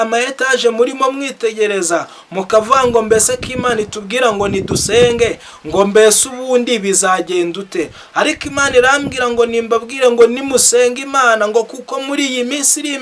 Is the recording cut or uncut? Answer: uncut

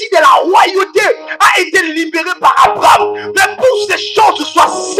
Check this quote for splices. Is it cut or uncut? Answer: uncut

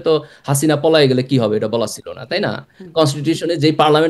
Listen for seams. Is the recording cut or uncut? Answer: uncut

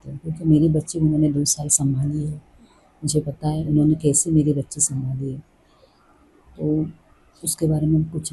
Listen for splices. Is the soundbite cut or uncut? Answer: uncut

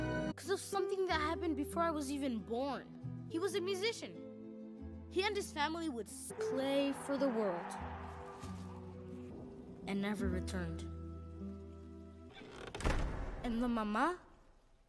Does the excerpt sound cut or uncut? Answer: uncut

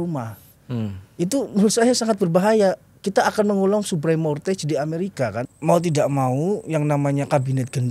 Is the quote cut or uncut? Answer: cut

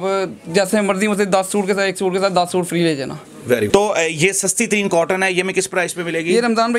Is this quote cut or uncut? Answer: uncut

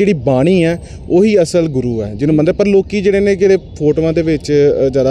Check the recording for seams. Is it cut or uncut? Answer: uncut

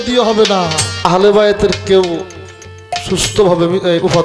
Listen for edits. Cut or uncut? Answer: cut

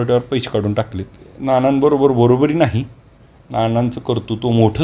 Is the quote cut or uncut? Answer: cut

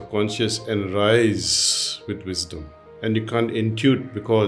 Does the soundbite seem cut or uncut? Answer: cut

